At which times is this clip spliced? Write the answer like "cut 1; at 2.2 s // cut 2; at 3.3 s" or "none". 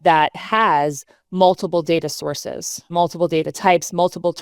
cut 1; at 2.9 s